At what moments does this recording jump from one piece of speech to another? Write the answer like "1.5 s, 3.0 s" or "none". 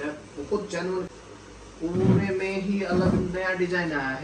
1.1 s